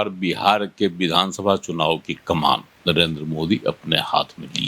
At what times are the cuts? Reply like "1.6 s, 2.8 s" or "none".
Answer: 2.7 s